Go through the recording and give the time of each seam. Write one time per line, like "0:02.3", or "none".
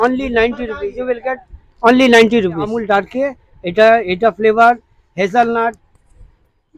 0:02.8